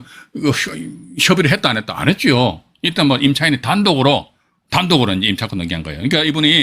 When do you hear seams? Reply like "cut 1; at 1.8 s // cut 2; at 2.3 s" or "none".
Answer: cut 1; at 4.4 s